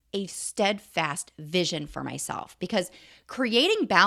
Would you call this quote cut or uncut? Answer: uncut